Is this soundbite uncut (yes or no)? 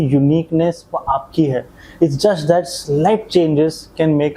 yes